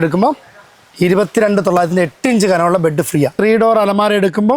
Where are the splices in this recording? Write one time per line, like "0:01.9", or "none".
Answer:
0:03.3